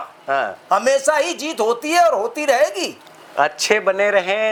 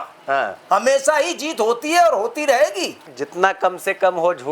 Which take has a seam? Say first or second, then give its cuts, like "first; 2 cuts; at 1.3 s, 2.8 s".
second; 1 cut; at 3.1 s